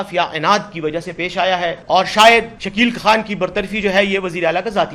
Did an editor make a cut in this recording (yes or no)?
yes